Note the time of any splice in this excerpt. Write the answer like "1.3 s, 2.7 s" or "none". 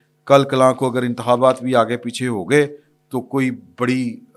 none